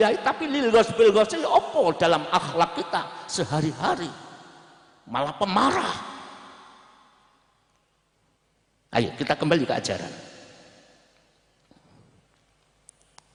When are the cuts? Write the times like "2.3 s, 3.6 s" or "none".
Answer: none